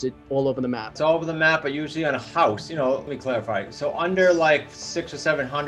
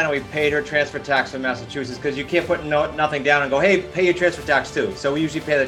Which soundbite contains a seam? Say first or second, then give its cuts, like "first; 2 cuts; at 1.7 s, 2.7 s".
first; 2 cuts; at 1.0 s, 3.1 s